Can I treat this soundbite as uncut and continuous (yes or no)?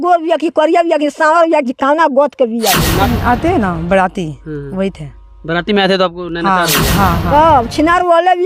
no